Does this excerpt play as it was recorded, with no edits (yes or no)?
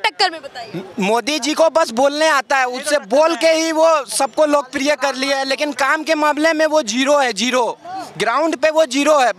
yes